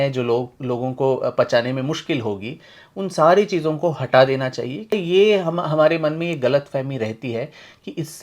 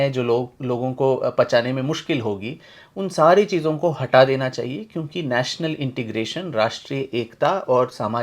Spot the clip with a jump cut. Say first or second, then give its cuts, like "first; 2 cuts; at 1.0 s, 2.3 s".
first; 1 cut; at 4.9 s